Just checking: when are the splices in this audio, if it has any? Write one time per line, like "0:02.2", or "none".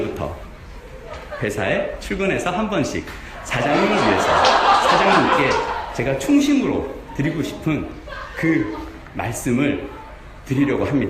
0:02.0

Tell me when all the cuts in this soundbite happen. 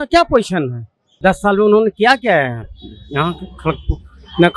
0:01.0

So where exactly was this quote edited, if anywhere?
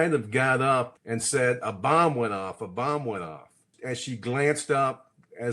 0:01.0
0:03.7

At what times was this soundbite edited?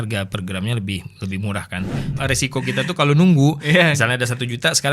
0:02.1

